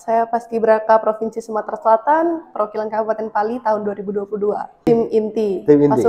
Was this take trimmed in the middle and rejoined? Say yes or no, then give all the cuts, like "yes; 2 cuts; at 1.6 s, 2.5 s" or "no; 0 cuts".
yes; 1 cut; at 4.9 s